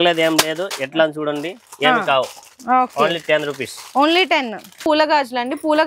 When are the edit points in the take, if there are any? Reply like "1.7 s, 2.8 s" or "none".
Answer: 4.8 s